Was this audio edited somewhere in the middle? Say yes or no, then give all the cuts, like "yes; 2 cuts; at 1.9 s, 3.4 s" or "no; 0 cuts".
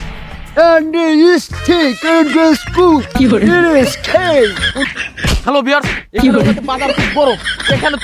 yes; 1 cut; at 4.8 s